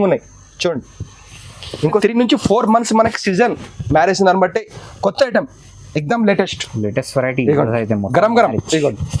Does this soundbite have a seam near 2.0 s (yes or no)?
yes